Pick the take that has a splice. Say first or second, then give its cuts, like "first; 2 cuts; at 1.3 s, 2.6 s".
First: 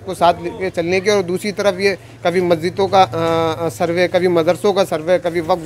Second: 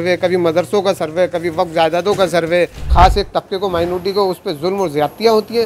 second; 1 cut; at 2.9 s